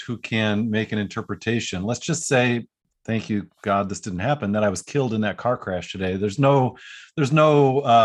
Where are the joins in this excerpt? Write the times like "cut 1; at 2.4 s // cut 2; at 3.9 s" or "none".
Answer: cut 1; at 2.8 s